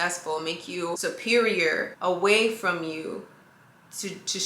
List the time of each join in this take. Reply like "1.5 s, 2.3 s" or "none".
1.0 s, 1.9 s